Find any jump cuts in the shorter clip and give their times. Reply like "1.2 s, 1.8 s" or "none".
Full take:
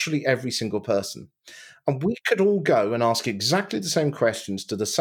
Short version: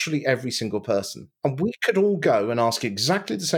1.2 s